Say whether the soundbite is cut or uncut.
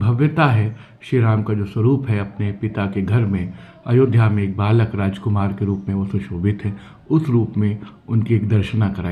uncut